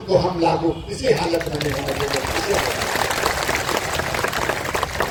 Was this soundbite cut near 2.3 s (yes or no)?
no